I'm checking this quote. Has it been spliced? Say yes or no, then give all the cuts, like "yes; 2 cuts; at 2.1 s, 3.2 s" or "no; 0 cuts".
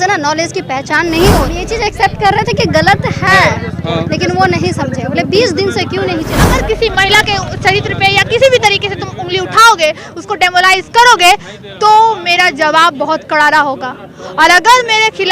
yes; 2 cuts; at 1.6 s, 6.4 s